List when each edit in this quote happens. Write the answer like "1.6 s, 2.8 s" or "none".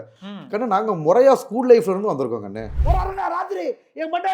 2.7 s